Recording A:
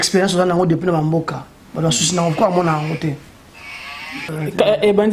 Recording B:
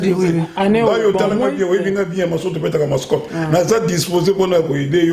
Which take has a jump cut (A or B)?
A